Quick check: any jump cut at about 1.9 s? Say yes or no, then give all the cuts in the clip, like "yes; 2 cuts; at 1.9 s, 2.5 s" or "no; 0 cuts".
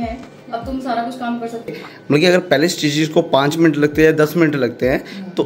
yes; 1 cut; at 1.9 s